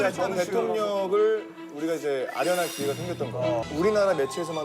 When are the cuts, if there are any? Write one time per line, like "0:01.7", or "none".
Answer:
0:03.6